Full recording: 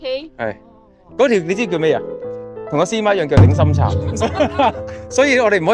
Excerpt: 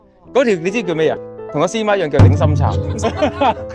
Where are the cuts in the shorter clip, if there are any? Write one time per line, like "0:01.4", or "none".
0:01.3